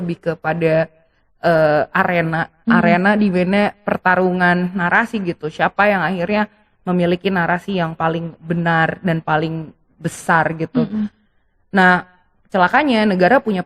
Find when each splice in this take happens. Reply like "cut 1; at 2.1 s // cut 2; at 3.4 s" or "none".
none

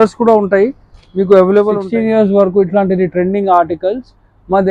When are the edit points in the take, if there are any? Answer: cut 1; at 1.8 s

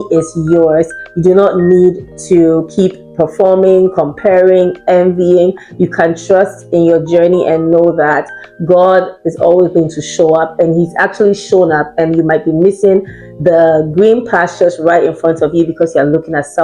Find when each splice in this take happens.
none

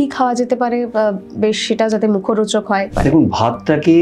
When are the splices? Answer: cut 1; at 2.9 s

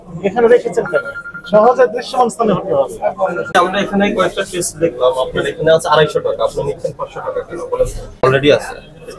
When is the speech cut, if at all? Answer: cut 1; at 3.5 s // cut 2; at 8.2 s

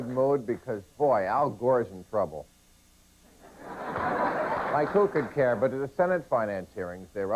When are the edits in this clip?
cut 1; at 6.1 s

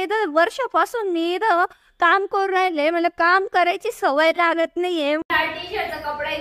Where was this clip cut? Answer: cut 1; at 5.2 s

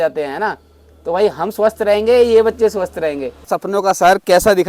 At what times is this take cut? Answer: cut 1; at 3.5 s

